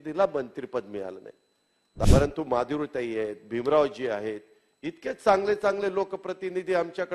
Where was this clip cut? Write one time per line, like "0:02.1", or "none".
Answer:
0:02.0